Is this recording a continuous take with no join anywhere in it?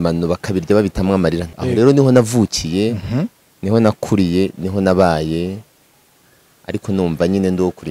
no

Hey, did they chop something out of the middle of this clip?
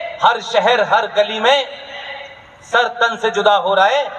no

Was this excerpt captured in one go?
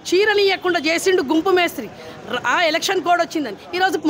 yes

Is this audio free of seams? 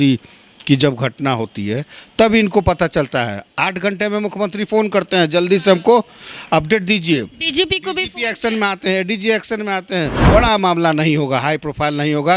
no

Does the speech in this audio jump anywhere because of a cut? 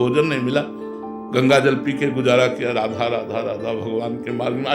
no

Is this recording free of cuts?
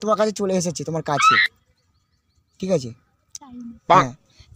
yes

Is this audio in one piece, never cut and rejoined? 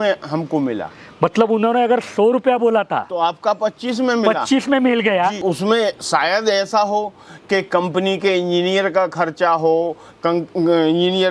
no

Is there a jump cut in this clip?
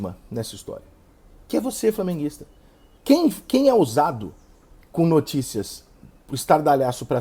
no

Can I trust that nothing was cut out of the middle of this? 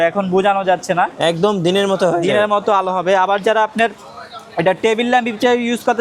yes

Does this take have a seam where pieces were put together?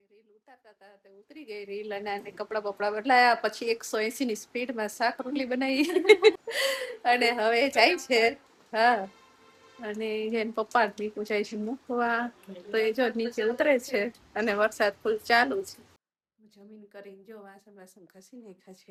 no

